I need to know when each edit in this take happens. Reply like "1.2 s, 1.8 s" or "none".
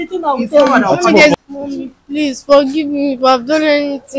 1.3 s